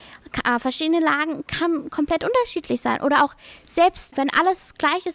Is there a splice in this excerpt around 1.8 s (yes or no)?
no